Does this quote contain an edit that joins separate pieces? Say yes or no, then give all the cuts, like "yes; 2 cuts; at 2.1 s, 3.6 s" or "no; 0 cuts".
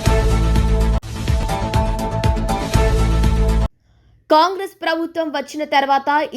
yes; 1 cut; at 1.1 s